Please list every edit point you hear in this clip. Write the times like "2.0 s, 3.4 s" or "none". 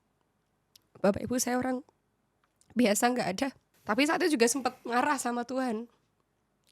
3.7 s